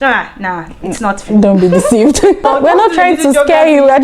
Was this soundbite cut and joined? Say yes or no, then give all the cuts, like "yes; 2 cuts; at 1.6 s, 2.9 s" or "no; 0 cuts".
yes; 1 cut; at 2.4 s